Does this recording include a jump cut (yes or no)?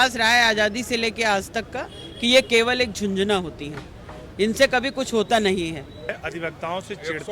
yes